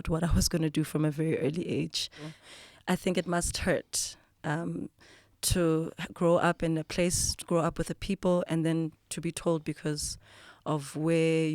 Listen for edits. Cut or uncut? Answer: cut